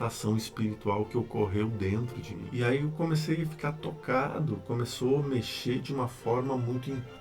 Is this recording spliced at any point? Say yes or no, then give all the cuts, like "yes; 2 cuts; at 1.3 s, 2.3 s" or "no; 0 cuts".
yes; 1 cut; at 2.5 s